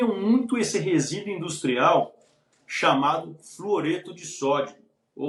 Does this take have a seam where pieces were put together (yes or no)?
no